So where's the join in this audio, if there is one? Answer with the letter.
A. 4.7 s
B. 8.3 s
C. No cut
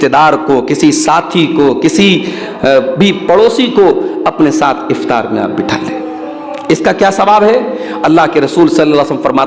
C